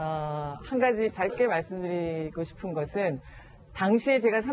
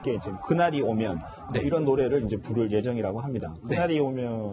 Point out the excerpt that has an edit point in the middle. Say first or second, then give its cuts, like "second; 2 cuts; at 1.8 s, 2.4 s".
first; 1 cut; at 1.9 s